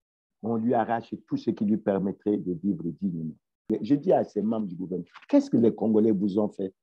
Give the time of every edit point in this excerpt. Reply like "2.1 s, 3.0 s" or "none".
3.5 s